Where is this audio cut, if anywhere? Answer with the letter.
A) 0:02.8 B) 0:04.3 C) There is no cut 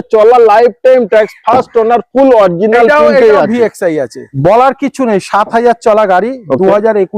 B